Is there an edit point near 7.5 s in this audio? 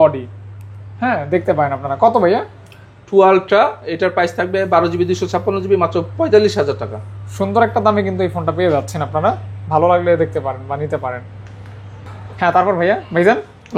no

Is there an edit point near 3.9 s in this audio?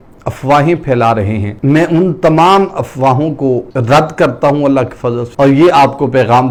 no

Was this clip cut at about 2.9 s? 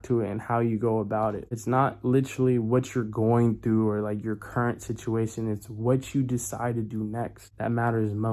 no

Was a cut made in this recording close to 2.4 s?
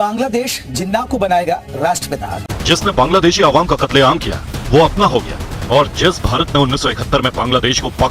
yes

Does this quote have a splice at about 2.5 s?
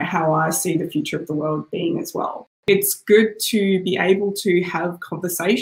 yes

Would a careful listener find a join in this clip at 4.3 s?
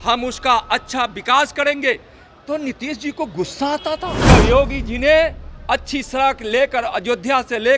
yes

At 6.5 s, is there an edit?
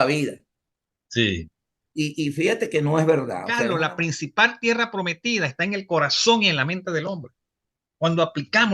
no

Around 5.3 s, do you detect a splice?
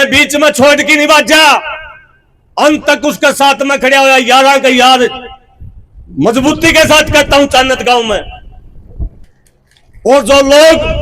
no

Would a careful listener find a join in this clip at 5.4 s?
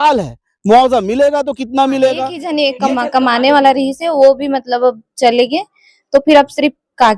no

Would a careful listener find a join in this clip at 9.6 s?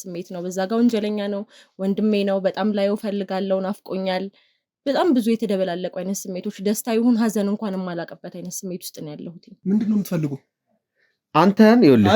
yes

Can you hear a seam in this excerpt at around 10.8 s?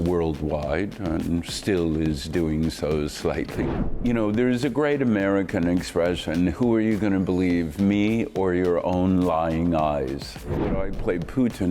yes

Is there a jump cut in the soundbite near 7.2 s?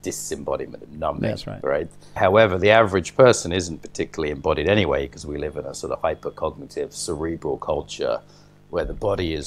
no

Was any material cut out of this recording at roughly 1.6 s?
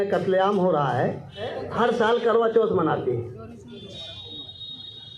yes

